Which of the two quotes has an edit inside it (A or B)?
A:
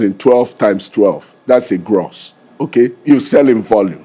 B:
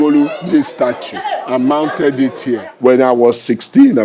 B